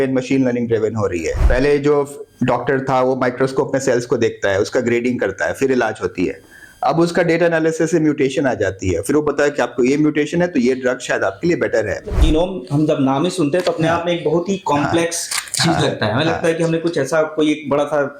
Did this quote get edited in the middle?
yes; 2 cuts; at 1.4 s, 12.1 s

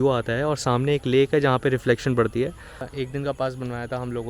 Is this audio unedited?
yes; 0 cuts

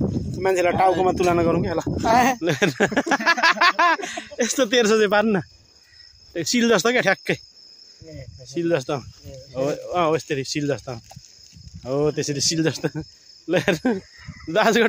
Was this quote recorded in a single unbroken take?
no; 1 cut; at 2.4 s

